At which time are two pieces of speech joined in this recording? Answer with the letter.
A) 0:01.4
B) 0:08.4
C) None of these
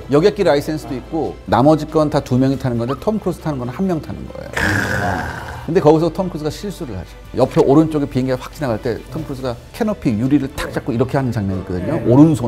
A